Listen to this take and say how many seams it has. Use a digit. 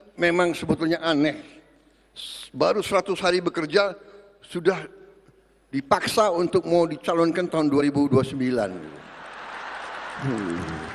0